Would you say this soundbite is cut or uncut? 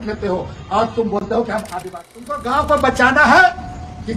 cut